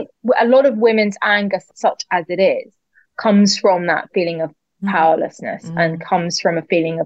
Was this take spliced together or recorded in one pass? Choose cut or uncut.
cut